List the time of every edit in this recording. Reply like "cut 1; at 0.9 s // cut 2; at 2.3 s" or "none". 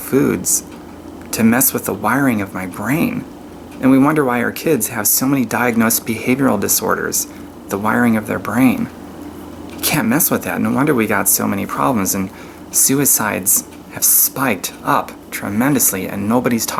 none